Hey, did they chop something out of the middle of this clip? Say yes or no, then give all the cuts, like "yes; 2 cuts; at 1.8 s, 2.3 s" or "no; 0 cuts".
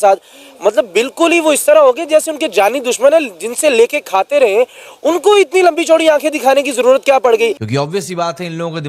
yes; 1 cut; at 7.6 s